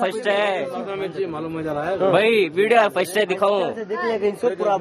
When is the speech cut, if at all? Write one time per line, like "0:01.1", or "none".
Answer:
0:01.3